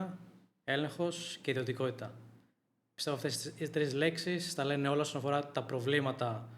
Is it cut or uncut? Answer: uncut